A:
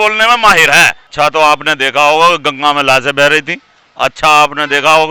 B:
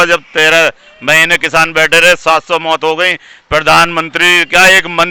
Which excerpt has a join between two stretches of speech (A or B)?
A